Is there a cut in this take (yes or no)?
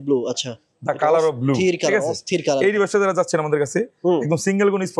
no